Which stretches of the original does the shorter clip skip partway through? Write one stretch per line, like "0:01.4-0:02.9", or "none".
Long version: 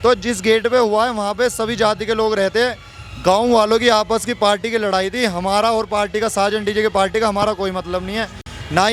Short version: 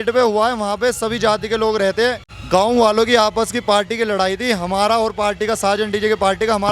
0:02.9-0:03.0